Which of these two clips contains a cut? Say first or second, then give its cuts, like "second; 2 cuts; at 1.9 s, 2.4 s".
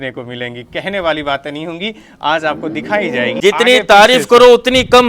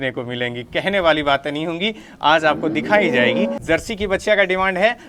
first; 1 cut; at 3.4 s